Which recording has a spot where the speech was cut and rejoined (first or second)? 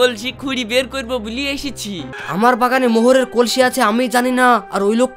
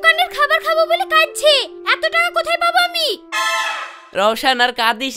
first